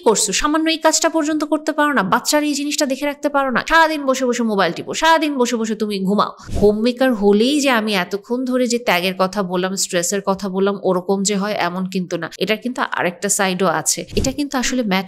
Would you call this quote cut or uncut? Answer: cut